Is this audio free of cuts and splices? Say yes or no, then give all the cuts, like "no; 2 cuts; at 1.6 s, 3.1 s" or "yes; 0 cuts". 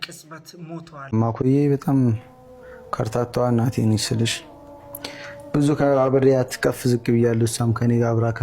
no; 1 cut; at 1.1 s